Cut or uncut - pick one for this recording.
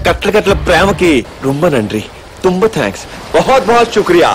uncut